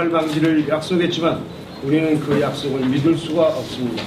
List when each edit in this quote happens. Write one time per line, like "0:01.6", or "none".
0:01.9

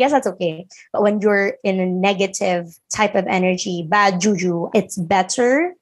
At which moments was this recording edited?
0:04.6

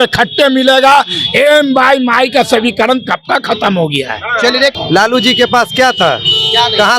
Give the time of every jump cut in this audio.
0:04.7

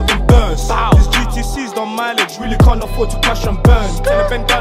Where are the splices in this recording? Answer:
none

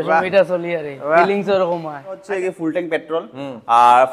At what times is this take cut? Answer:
0:02.2

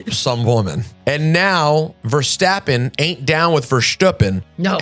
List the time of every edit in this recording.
0:00.9
0:02.0

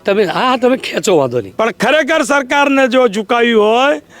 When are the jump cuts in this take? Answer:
0:01.5

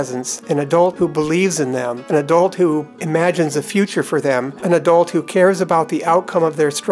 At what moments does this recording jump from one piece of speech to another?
0:00.9
0:02.0
0:02.9
0:04.6

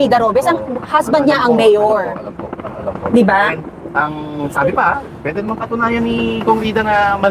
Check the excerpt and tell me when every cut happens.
none

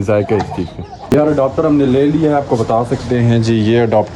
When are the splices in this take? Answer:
0:00.9

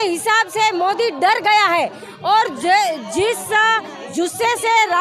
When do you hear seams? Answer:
none

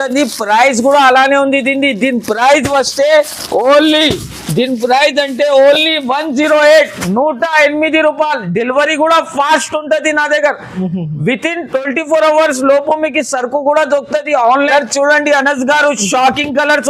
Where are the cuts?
0:14.7

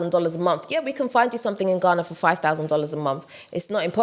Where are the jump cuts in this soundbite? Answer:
none

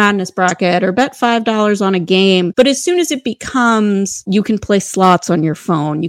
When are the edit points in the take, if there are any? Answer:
0:02.5
0:04.2

